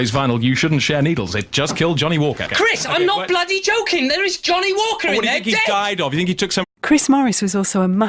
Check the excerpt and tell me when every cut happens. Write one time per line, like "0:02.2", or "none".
none